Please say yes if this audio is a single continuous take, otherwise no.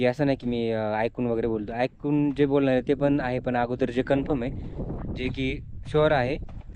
yes